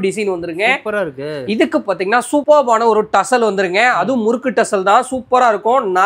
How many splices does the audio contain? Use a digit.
0